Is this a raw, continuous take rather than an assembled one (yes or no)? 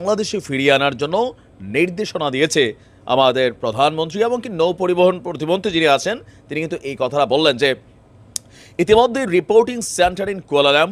yes